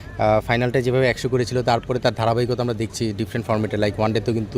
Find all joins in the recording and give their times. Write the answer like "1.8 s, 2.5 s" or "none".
none